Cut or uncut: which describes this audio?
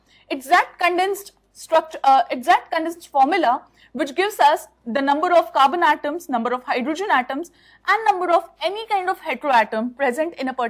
uncut